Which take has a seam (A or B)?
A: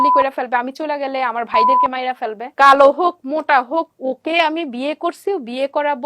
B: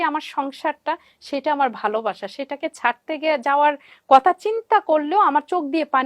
A